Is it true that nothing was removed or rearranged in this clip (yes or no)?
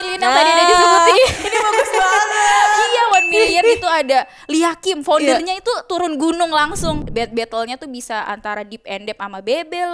no